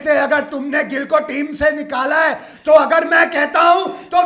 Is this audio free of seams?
yes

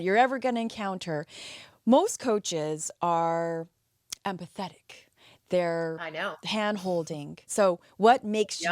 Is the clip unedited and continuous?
no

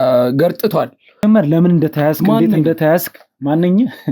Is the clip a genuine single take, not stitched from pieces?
no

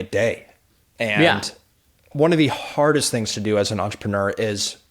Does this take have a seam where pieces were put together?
no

